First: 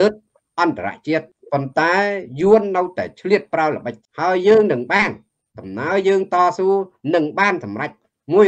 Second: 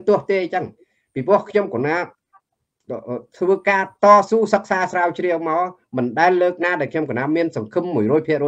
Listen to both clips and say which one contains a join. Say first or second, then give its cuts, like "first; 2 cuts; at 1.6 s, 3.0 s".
first; 2 cuts; at 1.4 s, 4.0 s